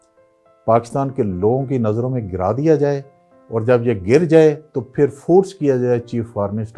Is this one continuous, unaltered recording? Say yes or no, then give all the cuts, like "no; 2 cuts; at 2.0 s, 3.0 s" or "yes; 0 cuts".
yes; 0 cuts